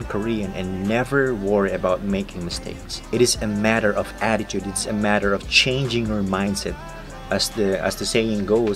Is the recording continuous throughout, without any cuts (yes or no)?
yes